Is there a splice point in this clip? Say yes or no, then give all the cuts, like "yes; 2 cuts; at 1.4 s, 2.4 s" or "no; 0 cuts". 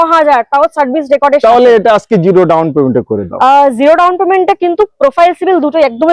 no; 0 cuts